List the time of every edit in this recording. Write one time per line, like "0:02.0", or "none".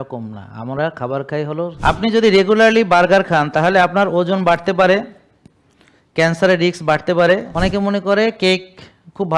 0:01.8
0:07.5